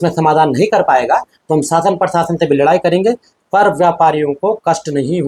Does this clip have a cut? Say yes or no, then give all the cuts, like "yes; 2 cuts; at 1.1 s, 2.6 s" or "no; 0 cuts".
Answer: no; 0 cuts